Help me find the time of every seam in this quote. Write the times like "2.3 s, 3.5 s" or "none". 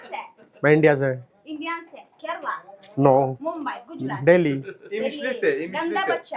none